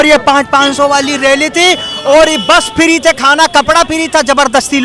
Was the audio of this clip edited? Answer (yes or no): no